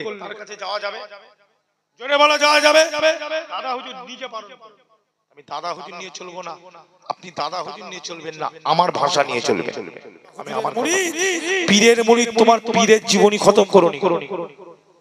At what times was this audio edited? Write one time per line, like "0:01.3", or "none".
0:10.7

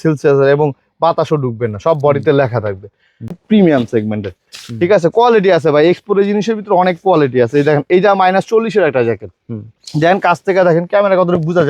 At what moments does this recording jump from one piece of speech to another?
0:03.4

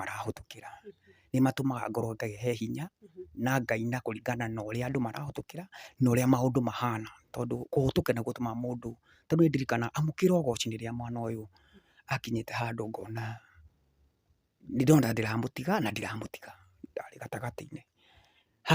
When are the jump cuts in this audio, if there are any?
none

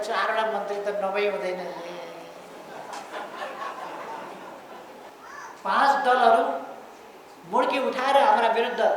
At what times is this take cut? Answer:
0:05.1

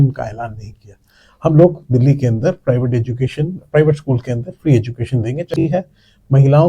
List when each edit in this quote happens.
0:05.5

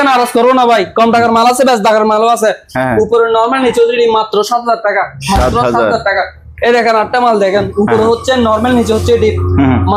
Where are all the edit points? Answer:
none

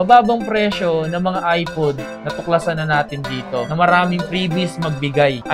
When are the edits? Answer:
none

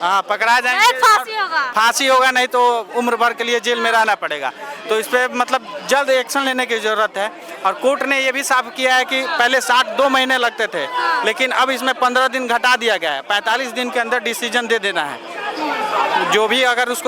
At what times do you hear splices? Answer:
none

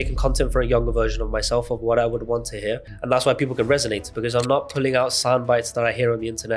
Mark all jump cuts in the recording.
0:02.9

